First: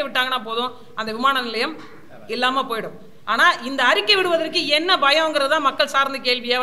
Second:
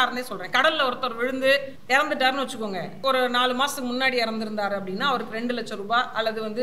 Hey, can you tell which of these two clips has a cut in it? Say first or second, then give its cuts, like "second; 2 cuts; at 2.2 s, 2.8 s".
second; 2 cuts; at 1.7 s, 2.9 s